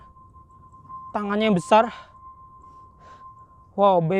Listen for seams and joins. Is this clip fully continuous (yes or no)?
yes